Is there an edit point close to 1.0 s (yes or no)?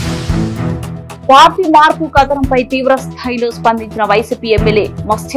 no